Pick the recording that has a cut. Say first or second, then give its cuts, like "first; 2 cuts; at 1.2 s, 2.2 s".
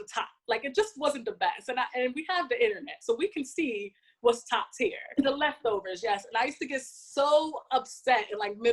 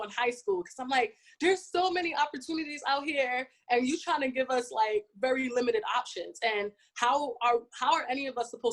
first; 1 cut; at 5.0 s